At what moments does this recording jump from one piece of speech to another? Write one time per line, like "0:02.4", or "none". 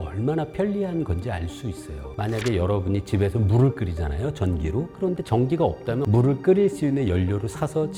none